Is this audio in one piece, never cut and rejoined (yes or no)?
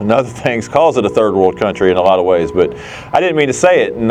yes